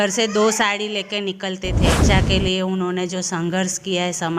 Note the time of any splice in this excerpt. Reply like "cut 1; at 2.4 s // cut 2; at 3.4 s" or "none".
cut 1; at 2.0 s